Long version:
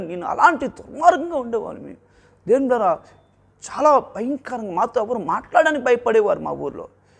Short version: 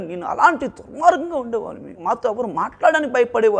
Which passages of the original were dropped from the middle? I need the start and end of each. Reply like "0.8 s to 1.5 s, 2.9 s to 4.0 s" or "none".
1.9 s to 4.6 s